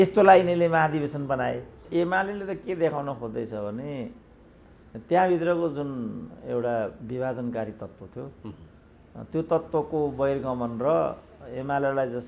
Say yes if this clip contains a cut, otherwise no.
yes